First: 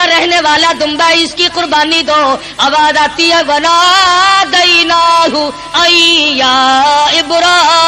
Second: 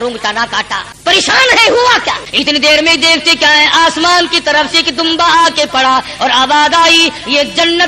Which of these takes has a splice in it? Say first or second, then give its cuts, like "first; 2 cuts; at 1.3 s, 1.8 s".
second; 2 cuts; at 0.9 s, 2.2 s